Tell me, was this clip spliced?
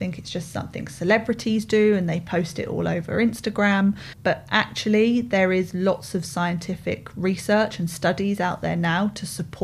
yes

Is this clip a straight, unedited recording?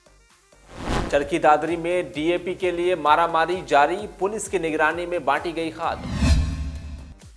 no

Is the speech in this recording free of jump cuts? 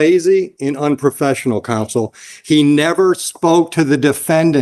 yes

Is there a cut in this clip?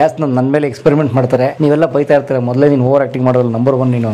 yes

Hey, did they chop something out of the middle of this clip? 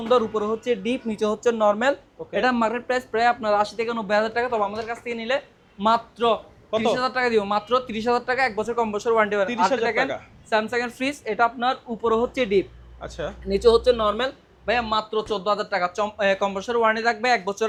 no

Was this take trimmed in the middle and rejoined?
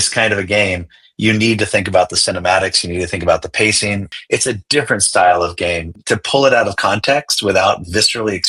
yes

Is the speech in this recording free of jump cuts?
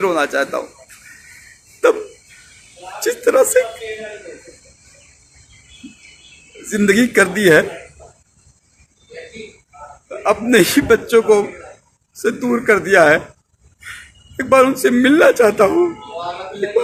yes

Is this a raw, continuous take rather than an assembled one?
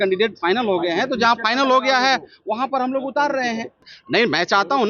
no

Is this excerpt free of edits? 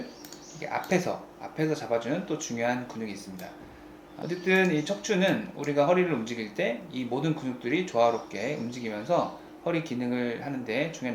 no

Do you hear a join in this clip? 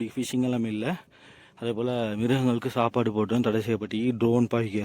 no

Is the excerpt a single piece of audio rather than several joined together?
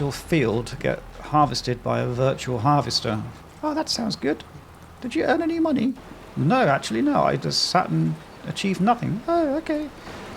no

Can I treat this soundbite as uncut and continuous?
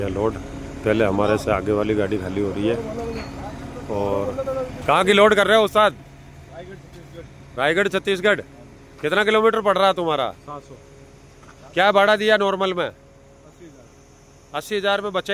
yes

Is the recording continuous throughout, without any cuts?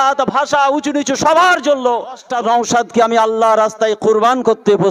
no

